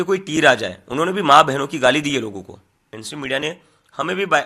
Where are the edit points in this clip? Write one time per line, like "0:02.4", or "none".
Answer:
0:03.0